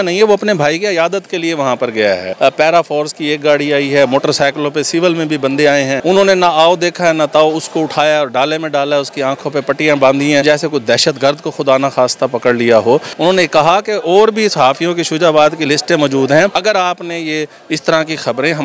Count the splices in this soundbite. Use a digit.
5